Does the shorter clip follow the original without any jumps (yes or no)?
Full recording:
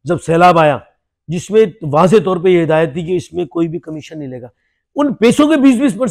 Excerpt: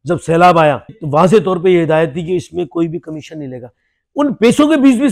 no